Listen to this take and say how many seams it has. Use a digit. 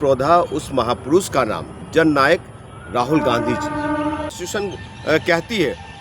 1